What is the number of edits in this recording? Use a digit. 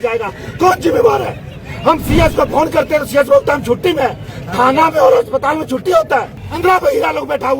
1